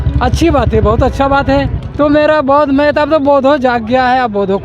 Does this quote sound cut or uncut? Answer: cut